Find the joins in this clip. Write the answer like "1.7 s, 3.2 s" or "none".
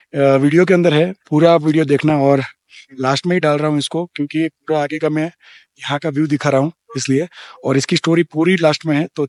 none